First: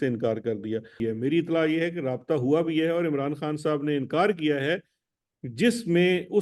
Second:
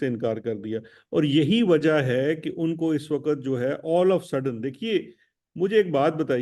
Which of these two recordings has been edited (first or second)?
first